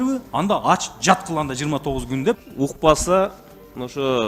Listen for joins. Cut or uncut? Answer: cut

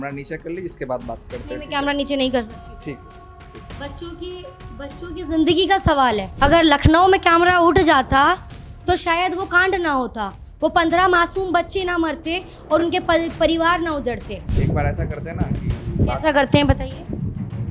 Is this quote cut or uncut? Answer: cut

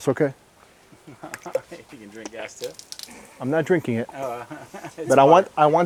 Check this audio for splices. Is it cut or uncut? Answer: uncut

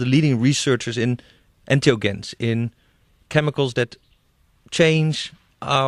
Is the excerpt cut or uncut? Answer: cut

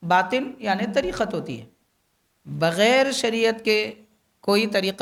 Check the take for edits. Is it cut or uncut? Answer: uncut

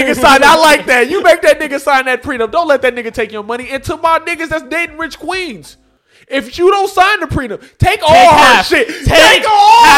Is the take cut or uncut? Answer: uncut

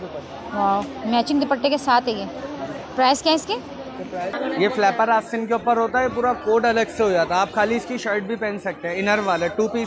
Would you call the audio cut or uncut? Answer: cut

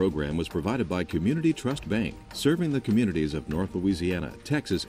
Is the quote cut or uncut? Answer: uncut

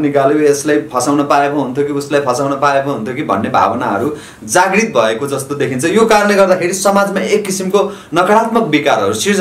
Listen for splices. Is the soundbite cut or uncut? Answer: uncut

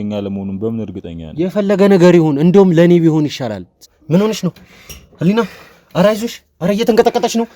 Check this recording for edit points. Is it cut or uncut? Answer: cut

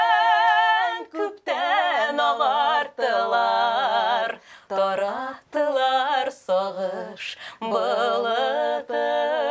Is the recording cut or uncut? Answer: uncut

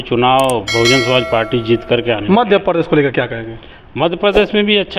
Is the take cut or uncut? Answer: uncut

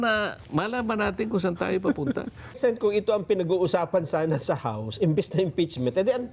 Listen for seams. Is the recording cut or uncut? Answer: cut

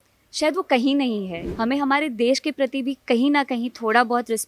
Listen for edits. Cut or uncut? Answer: cut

